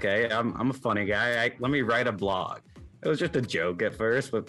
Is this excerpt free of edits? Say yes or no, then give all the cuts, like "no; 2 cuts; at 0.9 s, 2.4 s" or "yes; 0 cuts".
no; 1 cut; at 2.6 s